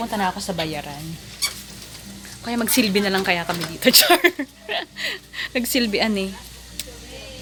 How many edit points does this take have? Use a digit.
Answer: 0